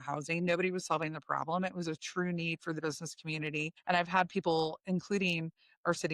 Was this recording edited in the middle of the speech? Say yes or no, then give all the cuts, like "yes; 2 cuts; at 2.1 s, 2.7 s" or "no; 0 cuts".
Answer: yes; 1 cut; at 3.8 s